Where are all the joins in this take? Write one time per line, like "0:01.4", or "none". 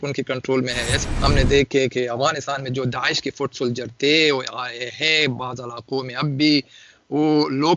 0:01.0